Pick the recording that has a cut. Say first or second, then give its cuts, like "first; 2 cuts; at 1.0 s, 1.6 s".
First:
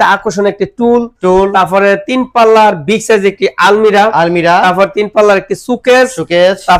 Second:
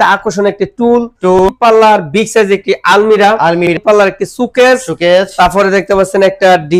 second; 2 cuts; at 1.5 s, 3.7 s